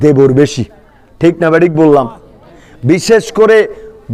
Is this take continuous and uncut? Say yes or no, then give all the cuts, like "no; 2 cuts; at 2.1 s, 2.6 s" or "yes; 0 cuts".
yes; 0 cuts